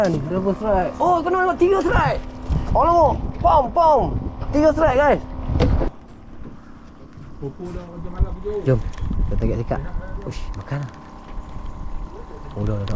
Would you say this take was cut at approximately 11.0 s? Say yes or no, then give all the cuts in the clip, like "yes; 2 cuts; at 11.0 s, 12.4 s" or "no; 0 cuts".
no; 1 cut; at 6.0 s